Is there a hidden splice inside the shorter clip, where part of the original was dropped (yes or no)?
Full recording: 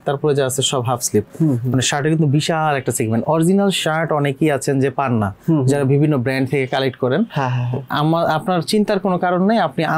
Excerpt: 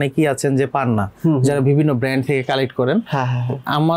no